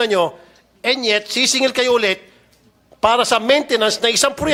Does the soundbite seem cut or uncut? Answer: uncut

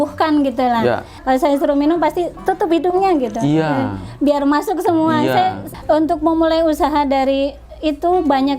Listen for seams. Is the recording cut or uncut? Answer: cut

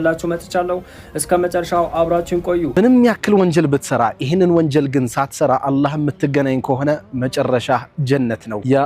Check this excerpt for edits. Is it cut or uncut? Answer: cut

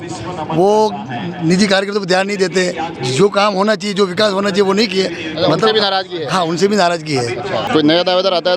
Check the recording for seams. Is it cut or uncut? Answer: cut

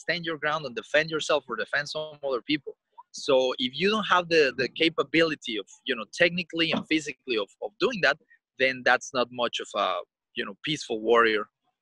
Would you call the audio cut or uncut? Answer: uncut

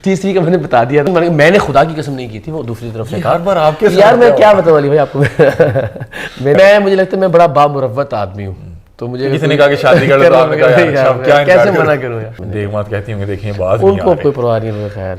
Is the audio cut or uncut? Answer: cut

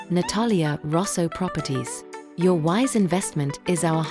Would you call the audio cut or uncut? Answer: uncut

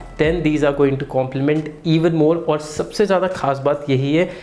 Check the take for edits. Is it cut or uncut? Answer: uncut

